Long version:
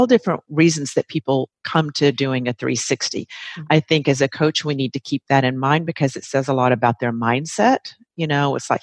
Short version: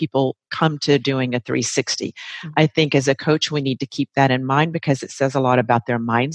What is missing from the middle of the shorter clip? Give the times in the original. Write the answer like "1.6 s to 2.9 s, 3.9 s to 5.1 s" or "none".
none